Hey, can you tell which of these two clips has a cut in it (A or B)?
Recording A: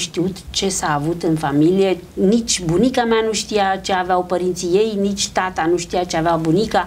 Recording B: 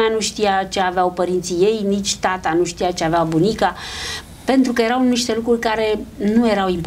A